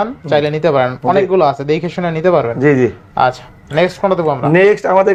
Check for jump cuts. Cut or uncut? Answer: uncut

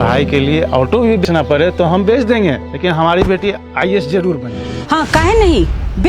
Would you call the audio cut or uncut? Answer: cut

